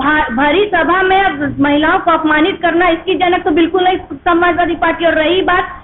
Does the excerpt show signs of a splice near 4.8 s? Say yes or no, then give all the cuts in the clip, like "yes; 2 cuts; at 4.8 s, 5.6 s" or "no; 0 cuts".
no; 0 cuts